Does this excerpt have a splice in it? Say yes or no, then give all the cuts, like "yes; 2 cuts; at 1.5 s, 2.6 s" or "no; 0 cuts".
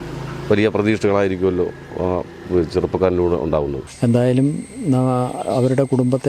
yes; 1 cut; at 3.8 s